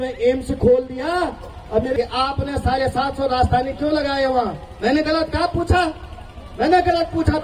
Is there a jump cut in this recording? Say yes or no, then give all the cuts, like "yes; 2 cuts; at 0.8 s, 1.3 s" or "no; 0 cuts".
yes; 1 cut; at 1.9 s